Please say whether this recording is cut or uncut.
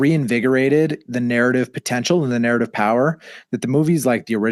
uncut